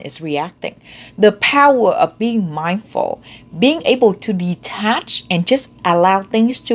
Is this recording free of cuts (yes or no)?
yes